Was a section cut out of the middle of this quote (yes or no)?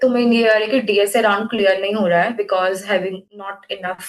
no